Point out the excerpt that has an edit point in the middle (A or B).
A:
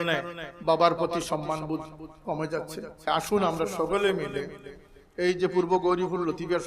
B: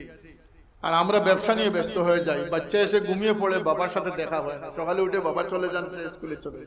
A